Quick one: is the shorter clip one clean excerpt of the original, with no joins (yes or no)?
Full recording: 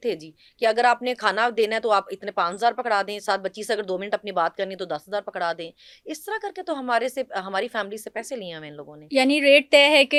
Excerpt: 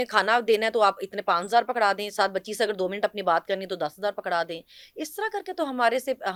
yes